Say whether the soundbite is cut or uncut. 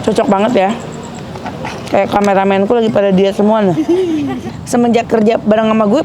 cut